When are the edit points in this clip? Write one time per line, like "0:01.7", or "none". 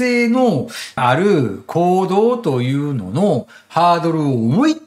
none